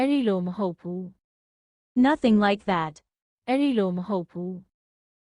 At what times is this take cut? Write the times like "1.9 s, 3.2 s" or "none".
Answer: none